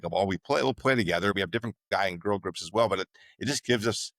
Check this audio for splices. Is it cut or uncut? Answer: cut